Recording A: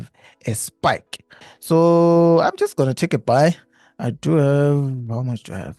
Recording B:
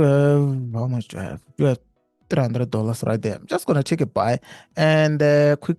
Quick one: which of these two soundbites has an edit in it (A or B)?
A